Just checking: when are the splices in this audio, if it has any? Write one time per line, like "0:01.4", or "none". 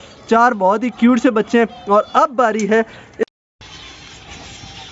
0:03.2